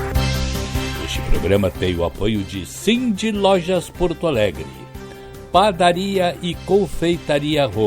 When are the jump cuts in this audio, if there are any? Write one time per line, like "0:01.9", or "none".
0:01.1